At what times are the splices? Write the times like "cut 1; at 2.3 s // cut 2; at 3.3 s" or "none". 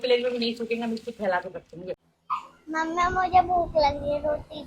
cut 1; at 2.1 s